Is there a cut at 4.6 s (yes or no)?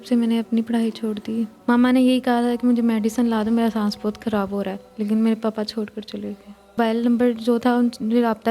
no